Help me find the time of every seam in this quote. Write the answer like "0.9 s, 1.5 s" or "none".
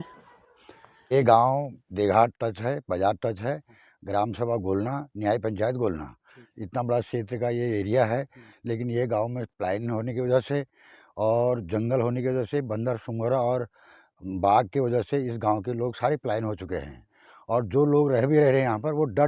1.1 s